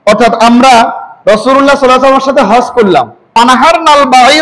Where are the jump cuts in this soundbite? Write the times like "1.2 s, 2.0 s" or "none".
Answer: 3.2 s